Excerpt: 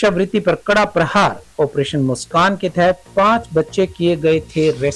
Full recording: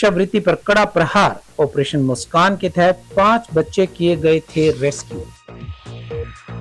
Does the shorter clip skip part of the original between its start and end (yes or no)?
no